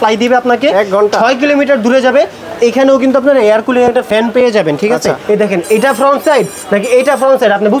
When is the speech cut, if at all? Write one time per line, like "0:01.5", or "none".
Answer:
0:05.2